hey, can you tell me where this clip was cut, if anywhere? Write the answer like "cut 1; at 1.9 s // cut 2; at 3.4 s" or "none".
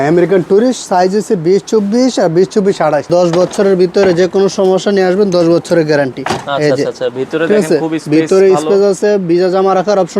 cut 1; at 3.1 s